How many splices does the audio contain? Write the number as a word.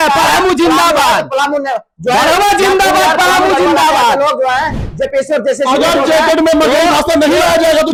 zero